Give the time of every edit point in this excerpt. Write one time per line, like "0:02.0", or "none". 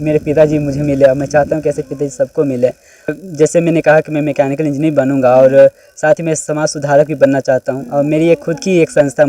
0:03.2